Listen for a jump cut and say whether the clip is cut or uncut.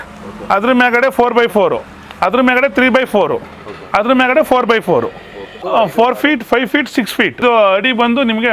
cut